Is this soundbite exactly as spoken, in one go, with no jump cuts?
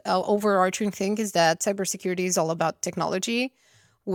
yes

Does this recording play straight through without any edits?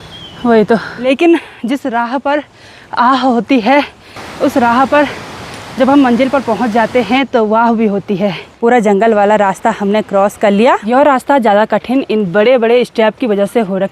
no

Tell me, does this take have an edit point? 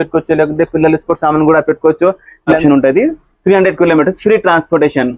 yes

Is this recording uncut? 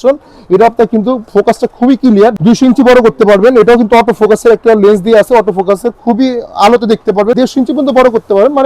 no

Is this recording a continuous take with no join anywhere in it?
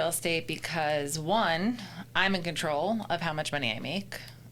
yes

